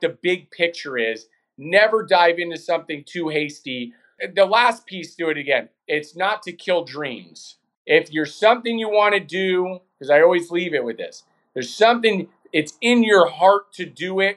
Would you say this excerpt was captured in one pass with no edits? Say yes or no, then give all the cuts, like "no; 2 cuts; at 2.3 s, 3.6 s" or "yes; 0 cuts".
yes; 0 cuts